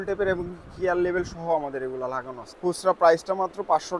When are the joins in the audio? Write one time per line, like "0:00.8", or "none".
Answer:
0:02.5

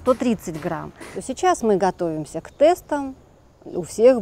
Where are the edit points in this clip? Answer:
0:01.1

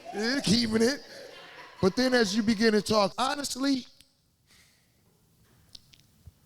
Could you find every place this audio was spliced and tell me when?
0:03.1

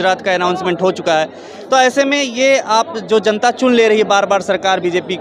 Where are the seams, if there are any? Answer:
none

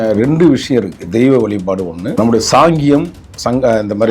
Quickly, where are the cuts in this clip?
0:02.0

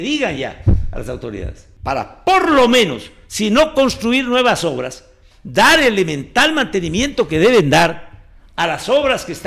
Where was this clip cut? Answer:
0:01.6

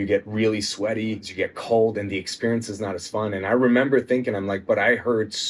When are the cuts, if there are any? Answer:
0:01.3

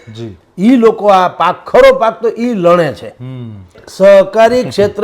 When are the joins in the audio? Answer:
0:03.8

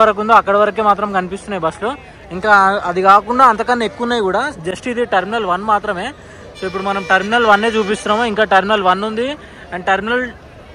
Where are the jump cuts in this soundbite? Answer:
none

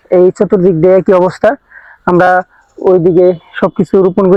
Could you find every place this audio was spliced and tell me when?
none

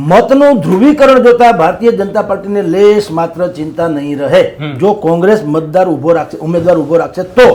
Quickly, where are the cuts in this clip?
none

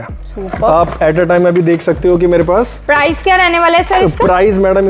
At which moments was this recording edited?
none

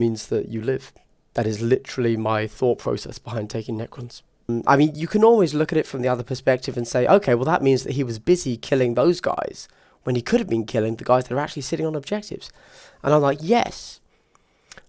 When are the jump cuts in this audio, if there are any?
0:04.5

